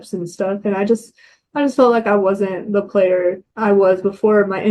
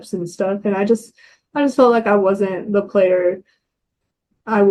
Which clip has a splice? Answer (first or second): first